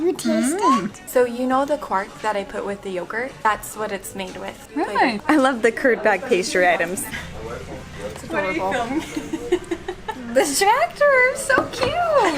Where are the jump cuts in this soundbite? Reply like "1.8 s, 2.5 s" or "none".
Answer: 1.0 s, 3.4 s, 5.2 s